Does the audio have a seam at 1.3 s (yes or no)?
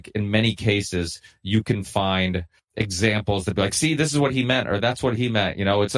no